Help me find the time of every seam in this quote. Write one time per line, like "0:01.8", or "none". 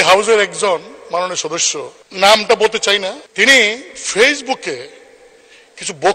0:02.0
0:03.2